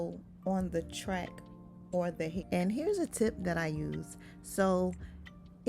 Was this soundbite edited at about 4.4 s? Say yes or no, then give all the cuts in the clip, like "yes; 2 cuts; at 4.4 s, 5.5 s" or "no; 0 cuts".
no; 1 cut; at 2.4 s